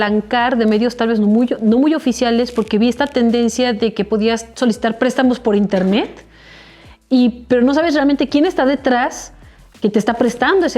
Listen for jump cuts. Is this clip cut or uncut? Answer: uncut